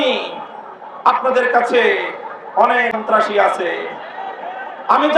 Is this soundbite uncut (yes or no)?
no